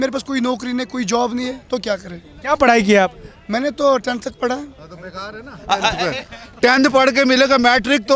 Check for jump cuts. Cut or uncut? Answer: uncut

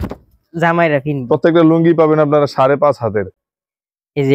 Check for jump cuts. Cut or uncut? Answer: uncut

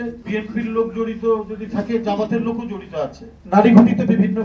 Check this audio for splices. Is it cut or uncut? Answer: cut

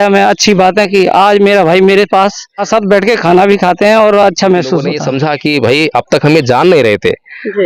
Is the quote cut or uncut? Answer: cut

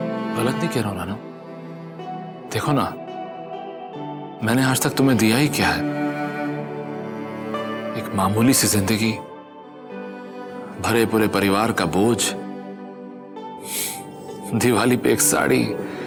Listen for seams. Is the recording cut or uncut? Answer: uncut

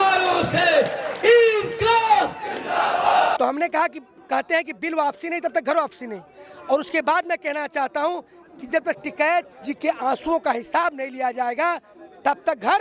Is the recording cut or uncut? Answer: cut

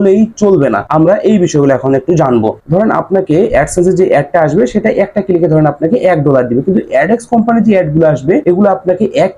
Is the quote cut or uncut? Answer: cut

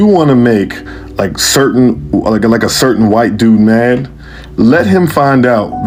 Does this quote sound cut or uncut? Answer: uncut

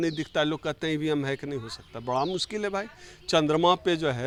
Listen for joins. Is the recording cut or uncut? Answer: uncut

